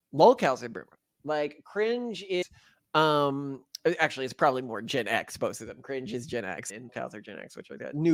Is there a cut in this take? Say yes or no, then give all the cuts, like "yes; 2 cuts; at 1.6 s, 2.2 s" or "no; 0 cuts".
no; 0 cuts